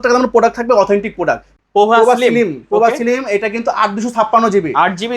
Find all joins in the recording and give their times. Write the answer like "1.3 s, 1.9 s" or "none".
1.6 s